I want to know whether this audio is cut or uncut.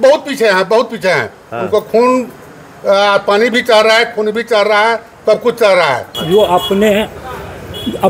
cut